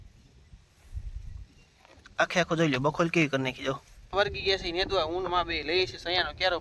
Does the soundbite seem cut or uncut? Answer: cut